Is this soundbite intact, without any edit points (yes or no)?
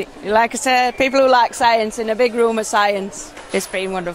yes